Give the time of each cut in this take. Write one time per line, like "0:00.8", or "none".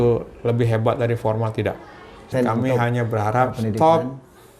0:02.3